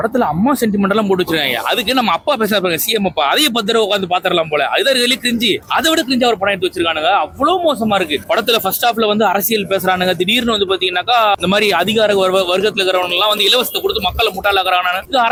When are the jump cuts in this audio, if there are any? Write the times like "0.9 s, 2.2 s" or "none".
none